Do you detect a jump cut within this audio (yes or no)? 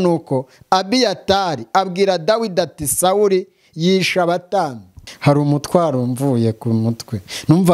yes